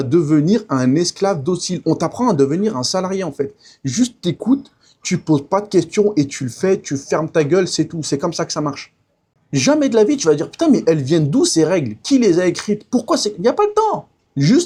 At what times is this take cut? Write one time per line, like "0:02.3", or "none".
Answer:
none